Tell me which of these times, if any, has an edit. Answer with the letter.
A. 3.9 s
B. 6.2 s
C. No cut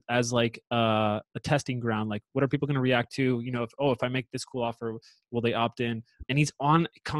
B